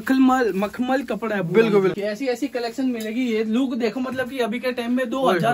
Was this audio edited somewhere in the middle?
yes; 1 cut; at 1.9 s

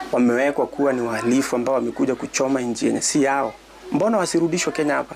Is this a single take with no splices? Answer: yes; 0 cuts

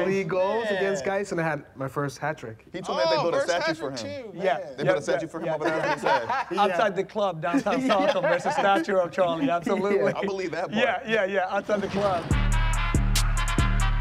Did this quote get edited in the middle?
yes; 1 cut; at 12.2 s

